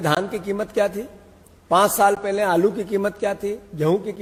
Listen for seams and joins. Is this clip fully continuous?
yes; 0 cuts

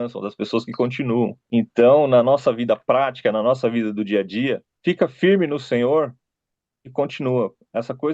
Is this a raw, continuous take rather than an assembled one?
no; 2 cuts; at 1.4 s, 4.7 s

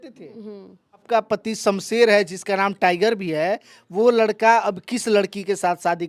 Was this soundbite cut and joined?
yes; 1 cut; at 1.0 s

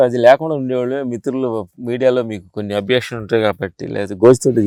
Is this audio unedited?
yes; 0 cuts

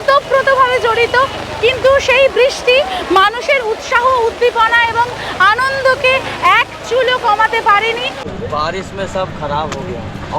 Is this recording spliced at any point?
yes; 1 cut; at 8.2 s

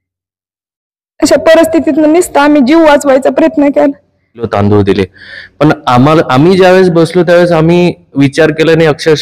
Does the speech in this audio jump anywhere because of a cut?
yes; 1 cut; at 4.5 s

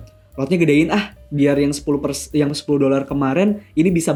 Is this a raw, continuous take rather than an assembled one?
yes; 0 cuts

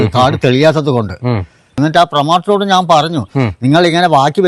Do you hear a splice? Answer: yes; 1 cut; at 1.8 s

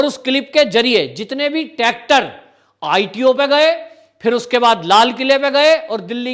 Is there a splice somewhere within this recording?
no; 0 cuts

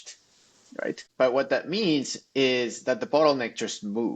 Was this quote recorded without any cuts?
no; 1 cut; at 1.1 s

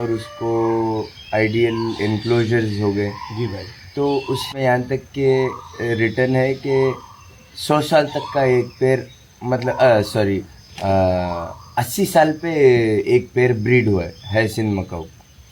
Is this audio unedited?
no; 1 cut; at 4.5 s

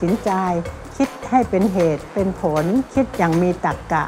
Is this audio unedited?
yes; 0 cuts

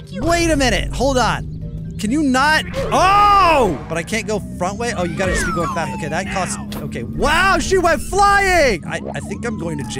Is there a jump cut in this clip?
yes; 2 cuts; at 3.8 s, 9.0 s

